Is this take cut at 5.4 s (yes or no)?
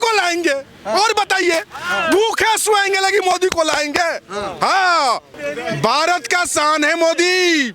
yes